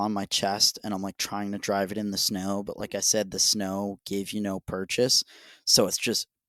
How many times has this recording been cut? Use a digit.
0